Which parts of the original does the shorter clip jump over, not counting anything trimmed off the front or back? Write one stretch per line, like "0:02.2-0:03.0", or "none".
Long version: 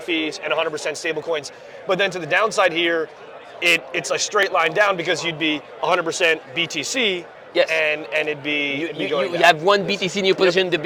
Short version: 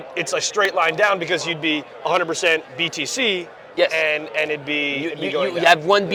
none

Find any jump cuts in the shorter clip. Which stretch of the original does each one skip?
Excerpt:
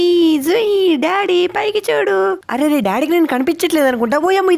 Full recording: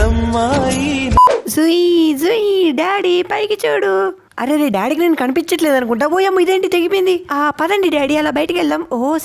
0:04.2-0:04.3

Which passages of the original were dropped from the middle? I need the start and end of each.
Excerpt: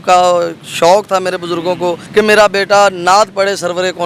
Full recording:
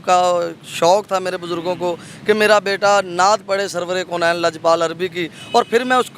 0:02.0-0:02.1

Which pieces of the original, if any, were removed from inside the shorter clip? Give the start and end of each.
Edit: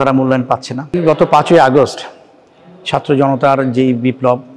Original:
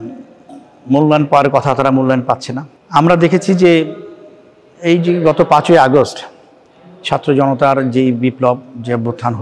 0:02.7-0:05.1

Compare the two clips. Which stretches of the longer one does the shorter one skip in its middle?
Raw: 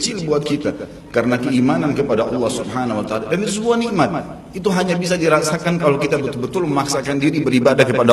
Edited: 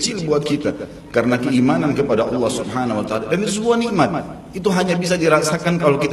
none

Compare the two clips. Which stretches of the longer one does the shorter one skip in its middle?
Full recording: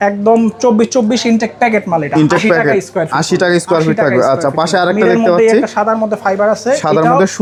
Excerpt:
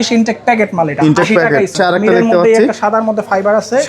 0:02.9-0:04.7

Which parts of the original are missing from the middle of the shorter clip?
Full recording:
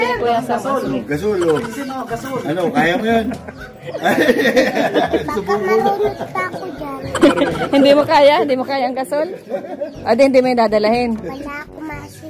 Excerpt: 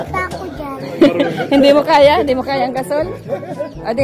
none

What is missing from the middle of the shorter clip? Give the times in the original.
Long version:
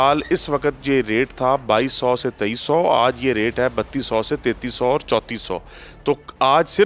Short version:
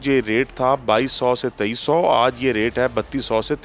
none

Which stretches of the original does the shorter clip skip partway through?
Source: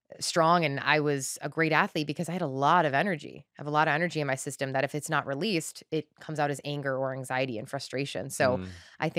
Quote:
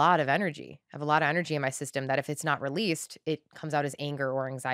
none

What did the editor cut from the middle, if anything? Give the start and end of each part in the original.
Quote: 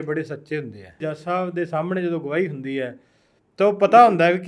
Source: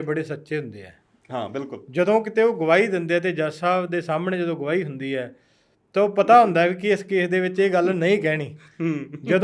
0:01.1-0:03.4

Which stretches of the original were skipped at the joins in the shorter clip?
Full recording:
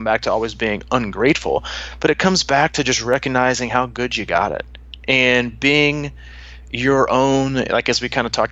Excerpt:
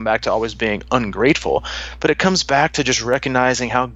none

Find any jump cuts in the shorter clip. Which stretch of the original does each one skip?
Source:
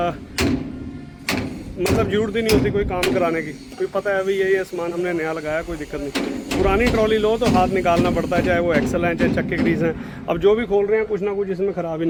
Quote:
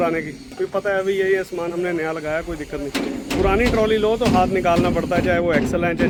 none

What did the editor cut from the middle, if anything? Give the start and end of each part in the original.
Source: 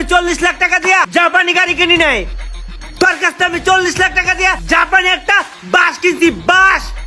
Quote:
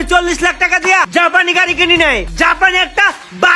0:02.3-0:04.6

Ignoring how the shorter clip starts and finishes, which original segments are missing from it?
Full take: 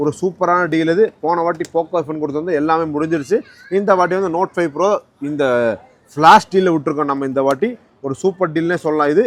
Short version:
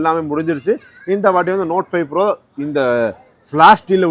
none

